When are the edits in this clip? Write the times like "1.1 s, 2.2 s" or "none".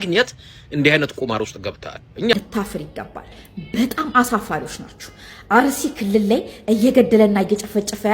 2.3 s